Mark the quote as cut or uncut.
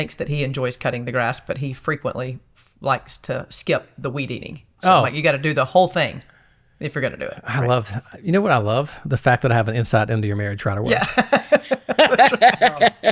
uncut